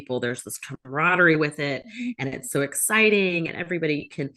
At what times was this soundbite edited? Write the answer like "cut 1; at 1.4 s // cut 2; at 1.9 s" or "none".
none